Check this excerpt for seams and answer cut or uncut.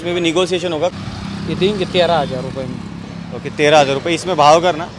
cut